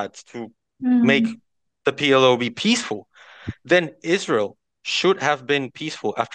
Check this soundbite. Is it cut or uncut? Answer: uncut